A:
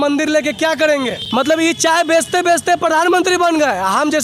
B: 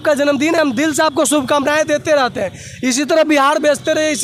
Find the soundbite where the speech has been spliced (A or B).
A